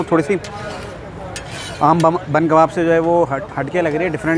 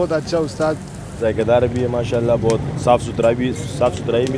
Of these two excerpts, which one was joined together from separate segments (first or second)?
second